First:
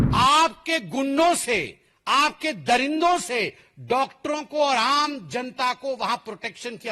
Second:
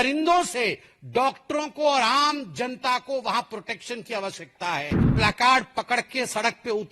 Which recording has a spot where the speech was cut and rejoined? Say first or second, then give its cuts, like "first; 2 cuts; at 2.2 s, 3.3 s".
second; 1 cut; at 5.1 s